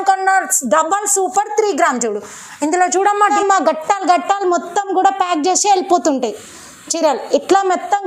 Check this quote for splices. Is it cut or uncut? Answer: cut